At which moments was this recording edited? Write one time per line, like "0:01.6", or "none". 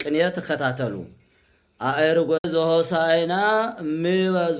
0:02.4

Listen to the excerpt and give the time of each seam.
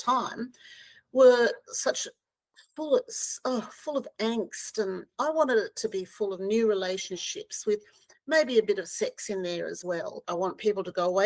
0:10.1

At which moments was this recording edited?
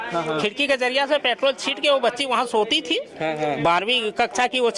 none

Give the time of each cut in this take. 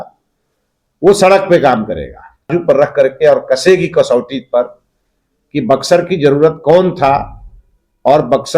0:02.5

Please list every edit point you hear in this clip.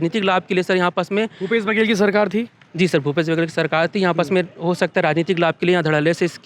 none

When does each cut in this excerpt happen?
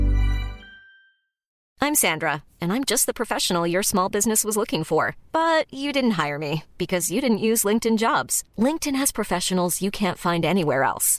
0:01.5

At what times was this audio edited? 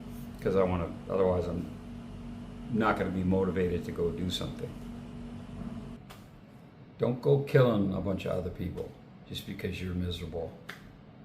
0:06.0

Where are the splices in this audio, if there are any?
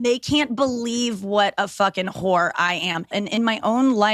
0:03.1

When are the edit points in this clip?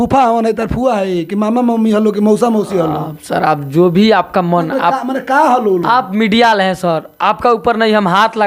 none

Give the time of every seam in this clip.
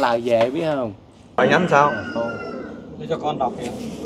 0:01.4

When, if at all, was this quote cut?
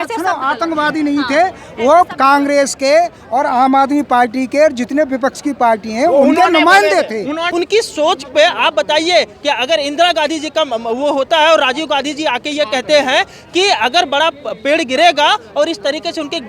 0:07.4

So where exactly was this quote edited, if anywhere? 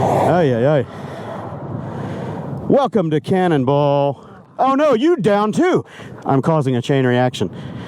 0:06.0

